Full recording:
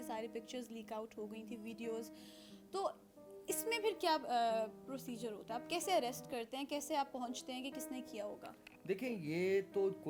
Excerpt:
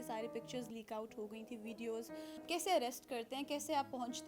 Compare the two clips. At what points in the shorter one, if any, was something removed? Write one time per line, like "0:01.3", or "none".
0:02.4